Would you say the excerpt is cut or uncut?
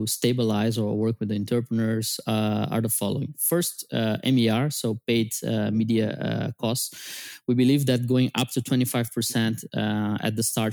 uncut